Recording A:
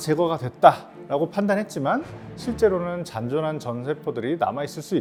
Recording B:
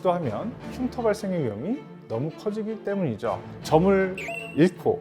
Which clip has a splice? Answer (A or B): B